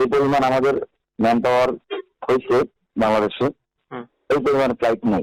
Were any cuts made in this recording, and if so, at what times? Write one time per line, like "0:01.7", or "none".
0:00.9